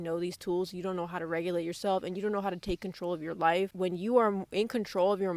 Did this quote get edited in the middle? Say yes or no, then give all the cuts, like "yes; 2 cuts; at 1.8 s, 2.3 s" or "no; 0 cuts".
no; 0 cuts